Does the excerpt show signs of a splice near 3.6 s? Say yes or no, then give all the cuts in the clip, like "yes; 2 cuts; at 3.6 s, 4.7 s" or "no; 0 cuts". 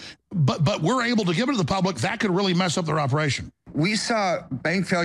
yes; 1 cut; at 3.6 s